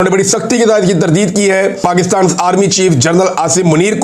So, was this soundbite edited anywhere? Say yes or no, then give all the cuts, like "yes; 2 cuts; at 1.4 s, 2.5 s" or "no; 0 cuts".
yes; 1 cut; at 1.8 s